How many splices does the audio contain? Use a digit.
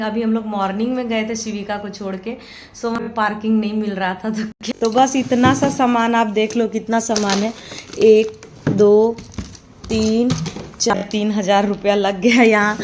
3